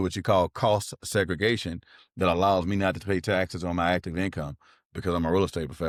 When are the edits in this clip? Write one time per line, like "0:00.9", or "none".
none